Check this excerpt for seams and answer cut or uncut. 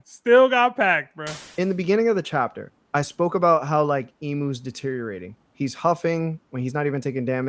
cut